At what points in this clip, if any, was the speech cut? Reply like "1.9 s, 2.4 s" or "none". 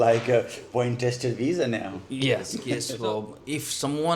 2.9 s